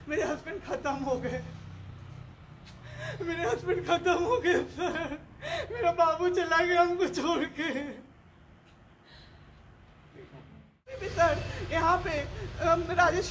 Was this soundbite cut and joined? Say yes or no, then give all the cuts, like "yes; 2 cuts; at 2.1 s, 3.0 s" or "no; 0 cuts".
yes; 1 cut; at 11.1 s